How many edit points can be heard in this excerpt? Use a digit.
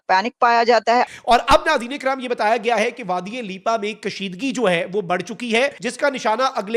2